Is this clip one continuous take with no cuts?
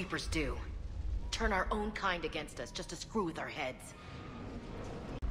yes; 0 cuts

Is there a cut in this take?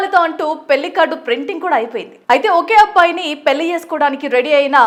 no; 0 cuts

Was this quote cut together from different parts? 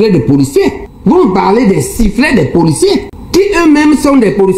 no; 0 cuts

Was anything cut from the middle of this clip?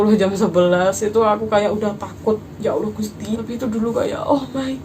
yes; 1 cut; at 3.4 s

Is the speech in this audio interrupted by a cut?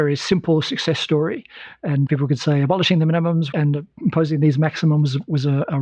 yes; 2 cuts; at 2.1 s, 3.5 s

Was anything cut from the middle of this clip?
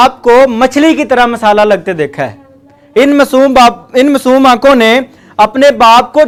no; 0 cuts

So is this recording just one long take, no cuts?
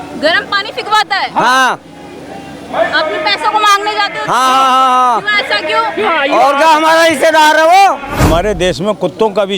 no; 1 cut; at 8.2 s

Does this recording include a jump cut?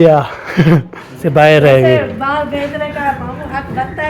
yes; 1 cut; at 1.2 s

